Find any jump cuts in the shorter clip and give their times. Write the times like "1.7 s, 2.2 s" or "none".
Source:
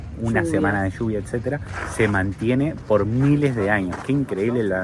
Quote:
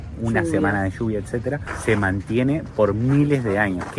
1.7 s